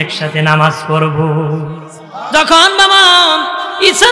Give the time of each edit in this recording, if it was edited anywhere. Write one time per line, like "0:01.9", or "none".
0:02.0